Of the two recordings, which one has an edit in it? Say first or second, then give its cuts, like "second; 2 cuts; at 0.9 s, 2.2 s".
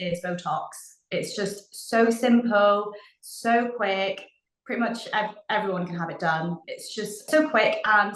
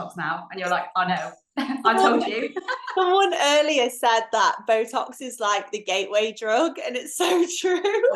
first; 1 cut; at 6.7 s